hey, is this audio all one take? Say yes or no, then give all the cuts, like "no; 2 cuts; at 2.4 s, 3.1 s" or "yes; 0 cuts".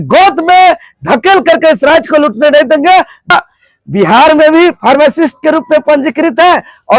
no; 1 cut; at 3.3 s